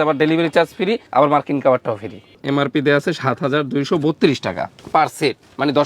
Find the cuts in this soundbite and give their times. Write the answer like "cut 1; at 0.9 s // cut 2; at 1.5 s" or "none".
cut 1; at 2.4 s